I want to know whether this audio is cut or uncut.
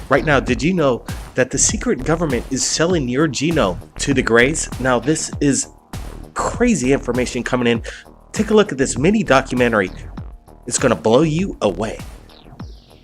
cut